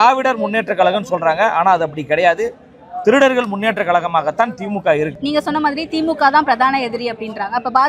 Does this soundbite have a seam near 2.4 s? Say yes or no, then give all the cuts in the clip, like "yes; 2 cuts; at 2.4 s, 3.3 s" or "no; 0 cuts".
no; 1 cut; at 5.2 s